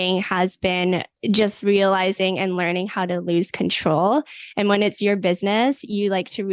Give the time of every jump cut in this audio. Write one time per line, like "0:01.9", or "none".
0:01.1